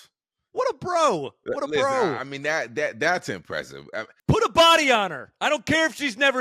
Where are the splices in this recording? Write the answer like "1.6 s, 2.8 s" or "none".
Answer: 4.1 s